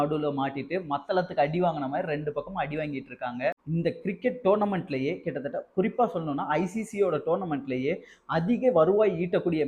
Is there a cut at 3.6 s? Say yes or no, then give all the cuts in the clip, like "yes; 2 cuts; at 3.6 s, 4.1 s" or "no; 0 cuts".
yes; 1 cut; at 3.6 s